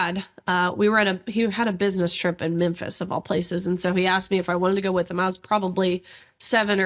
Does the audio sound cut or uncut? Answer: uncut